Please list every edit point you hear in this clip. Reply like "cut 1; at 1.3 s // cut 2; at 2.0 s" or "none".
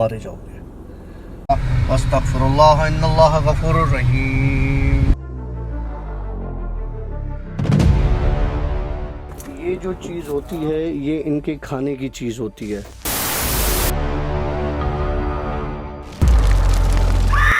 cut 1; at 1.4 s